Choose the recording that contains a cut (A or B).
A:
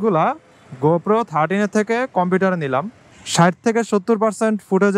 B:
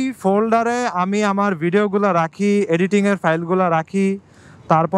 A